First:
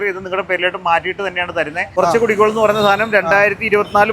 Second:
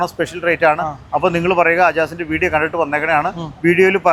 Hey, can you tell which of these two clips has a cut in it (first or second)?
first